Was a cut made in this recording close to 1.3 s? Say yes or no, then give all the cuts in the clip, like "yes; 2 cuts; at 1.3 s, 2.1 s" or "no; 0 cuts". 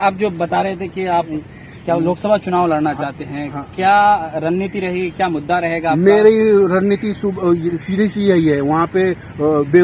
yes; 1 cut; at 1.3 s